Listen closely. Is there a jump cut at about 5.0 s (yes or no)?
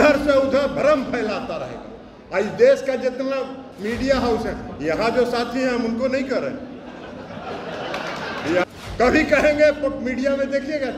no